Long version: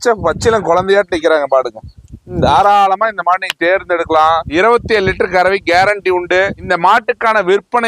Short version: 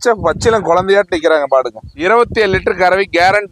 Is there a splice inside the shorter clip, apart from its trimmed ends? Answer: yes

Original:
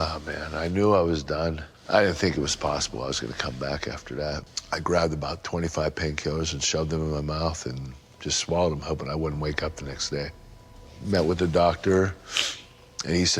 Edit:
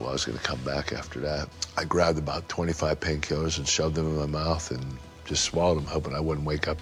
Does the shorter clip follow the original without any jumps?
yes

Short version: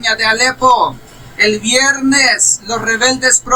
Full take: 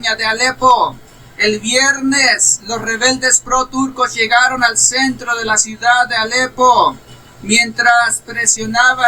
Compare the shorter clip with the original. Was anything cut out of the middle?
no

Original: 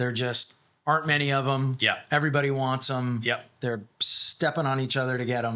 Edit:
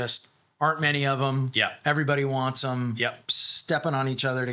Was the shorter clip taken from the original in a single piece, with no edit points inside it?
no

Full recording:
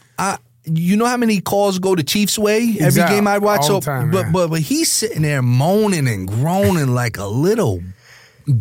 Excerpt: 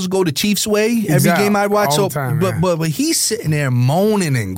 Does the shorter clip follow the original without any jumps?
yes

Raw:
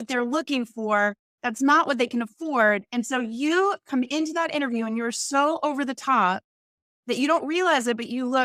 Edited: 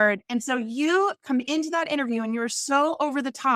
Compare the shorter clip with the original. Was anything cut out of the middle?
no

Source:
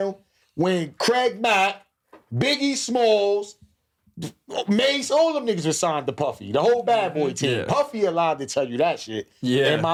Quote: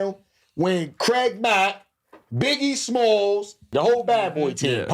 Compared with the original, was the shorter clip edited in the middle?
yes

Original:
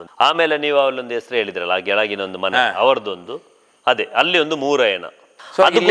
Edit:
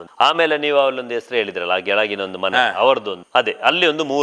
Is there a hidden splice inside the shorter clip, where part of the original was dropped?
yes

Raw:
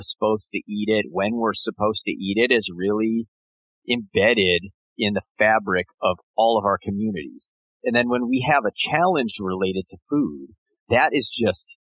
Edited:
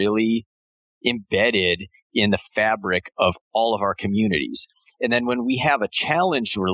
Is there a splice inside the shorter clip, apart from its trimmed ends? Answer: no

